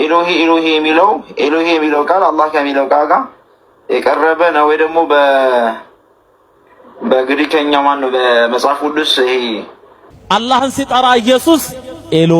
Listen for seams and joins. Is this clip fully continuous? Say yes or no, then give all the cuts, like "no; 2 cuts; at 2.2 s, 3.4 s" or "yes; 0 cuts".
no; 1 cut; at 10.0 s